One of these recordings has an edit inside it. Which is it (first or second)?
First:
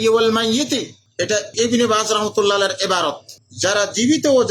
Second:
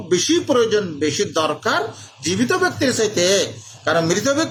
first